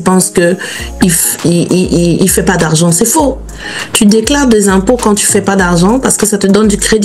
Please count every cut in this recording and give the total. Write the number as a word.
zero